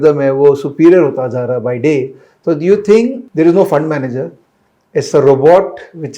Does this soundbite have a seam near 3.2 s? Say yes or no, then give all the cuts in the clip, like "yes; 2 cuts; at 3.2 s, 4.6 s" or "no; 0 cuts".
yes; 1 cut; at 3.2 s